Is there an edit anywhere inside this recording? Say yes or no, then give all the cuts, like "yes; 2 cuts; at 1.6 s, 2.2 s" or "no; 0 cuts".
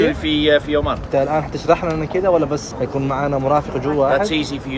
yes; 2 cuts; at 1.0 s, 2.7 s